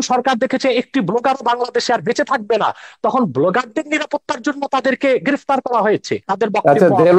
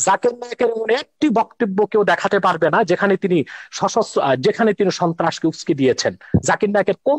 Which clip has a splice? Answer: first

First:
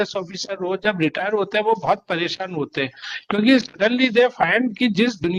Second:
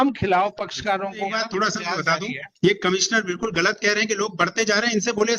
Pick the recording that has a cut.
second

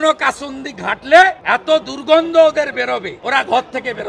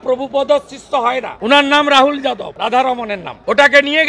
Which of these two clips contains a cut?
second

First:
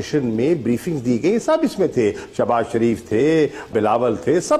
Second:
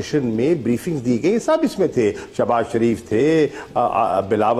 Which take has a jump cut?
first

